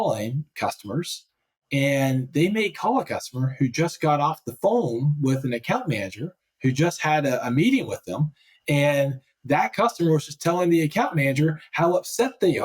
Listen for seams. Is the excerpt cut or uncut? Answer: uncut